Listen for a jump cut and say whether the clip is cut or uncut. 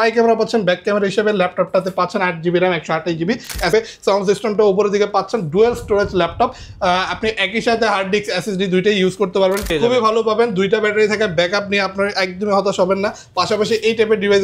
cut